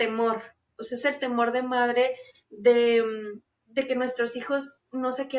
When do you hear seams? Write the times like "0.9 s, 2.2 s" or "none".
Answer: none